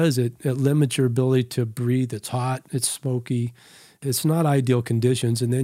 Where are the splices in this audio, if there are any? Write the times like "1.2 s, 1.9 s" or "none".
4.0 s